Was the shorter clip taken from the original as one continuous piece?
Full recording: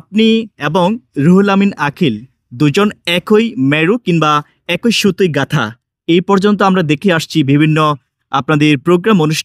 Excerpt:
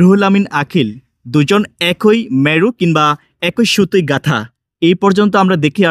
yes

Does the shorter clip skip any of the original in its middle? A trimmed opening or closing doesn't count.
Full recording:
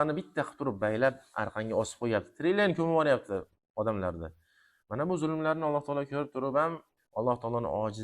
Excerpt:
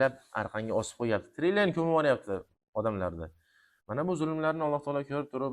no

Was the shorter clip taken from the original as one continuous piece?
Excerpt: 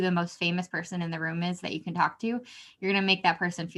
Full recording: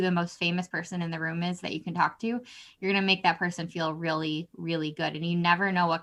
yes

